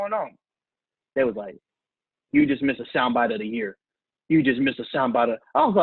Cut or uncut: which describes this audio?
uncut